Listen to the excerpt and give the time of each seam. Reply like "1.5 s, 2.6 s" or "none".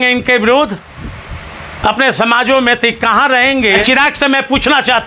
3.8 s

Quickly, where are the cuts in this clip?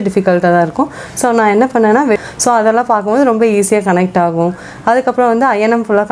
2.2 s

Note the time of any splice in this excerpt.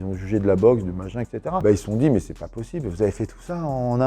1.6 s

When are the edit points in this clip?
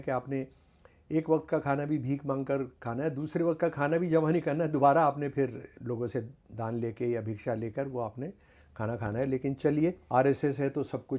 5.7 s, 10.0 s

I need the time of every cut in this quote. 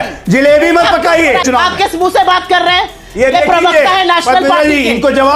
1.4 s

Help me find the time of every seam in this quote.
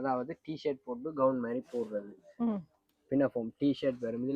none

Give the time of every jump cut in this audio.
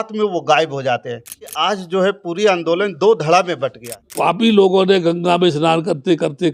1.5 s, 4.1 s

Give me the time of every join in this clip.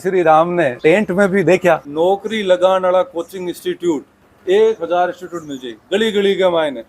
1.8 s

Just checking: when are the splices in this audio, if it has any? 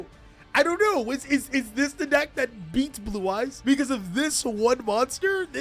3.6 s

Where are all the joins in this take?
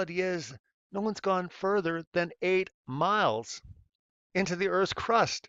none

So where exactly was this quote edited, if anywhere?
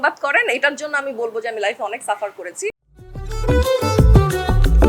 3.2 s

